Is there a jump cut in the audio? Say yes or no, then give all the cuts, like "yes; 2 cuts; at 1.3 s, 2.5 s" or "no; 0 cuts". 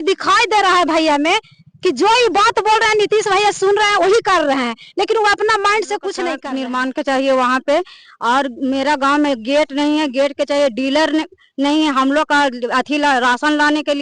yes; 1 cut; at 6.4 s